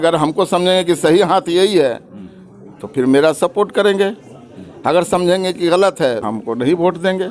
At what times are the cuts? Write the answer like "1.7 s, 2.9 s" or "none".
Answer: 6.2 s